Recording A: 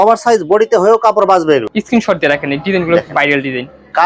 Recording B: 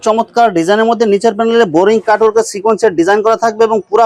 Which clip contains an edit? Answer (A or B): A